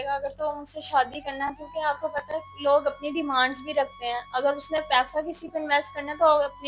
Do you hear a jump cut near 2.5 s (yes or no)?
no